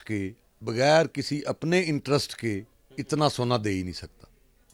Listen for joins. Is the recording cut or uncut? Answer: uncut